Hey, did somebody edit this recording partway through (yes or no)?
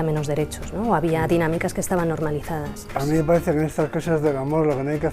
yes